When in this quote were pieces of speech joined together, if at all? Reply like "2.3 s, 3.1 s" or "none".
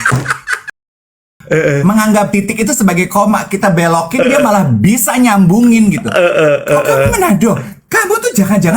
1.2 s